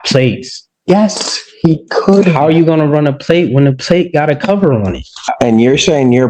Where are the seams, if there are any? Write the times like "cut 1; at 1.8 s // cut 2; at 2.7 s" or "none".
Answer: cut 1; at 5.3 s